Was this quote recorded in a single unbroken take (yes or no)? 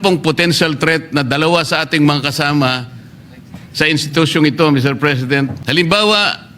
no